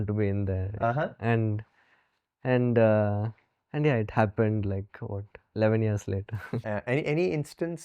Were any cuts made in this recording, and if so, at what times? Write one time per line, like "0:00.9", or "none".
0:06.6